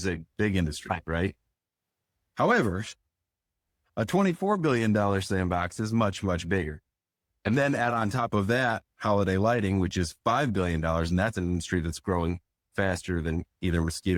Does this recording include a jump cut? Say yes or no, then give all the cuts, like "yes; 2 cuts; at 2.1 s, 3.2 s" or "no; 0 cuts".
no; 0 cuts